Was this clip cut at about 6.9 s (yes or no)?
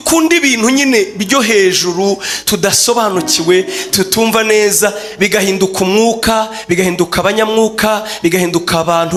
no